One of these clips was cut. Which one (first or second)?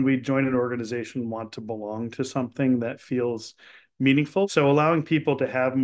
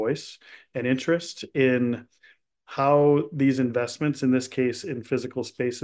first